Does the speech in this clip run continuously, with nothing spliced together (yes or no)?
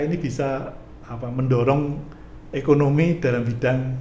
yes